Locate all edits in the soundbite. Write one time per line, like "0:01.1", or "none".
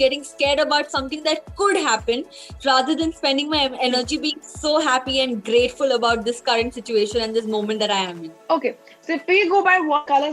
none